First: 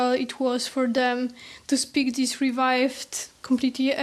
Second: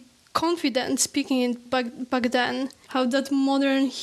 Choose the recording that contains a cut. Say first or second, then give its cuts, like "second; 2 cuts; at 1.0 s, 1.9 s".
second; 2 cuts; at 1.5 s, 2.8 s